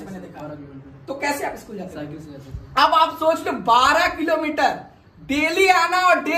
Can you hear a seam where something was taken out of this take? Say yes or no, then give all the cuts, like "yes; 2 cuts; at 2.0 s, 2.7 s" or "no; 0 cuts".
no; 0 cuts